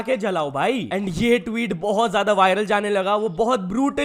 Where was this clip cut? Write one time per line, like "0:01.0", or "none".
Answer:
none